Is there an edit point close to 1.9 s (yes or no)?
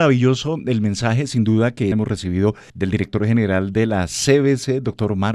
yes